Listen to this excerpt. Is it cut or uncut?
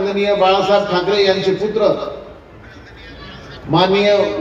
uncut